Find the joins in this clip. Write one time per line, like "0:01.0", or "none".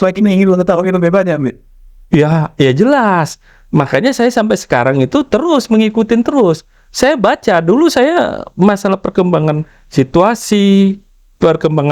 none